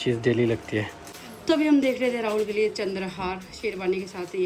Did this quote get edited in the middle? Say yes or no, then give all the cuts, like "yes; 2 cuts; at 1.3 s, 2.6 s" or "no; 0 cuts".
yes; 1 cut; at 1.0 s